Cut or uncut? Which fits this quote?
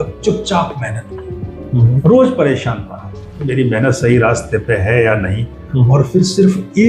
uncut